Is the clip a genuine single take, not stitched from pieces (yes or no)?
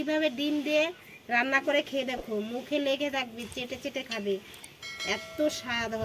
yes